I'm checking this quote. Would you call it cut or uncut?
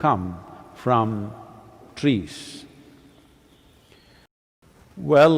cut